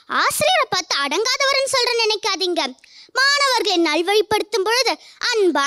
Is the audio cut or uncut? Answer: uncut